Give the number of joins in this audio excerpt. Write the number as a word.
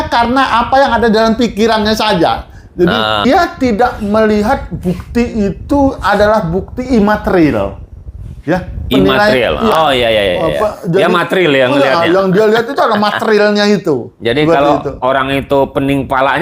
one